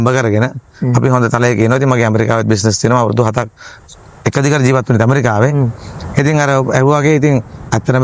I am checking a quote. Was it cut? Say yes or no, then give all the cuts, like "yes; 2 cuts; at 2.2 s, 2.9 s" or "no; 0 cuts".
no; 0 cuts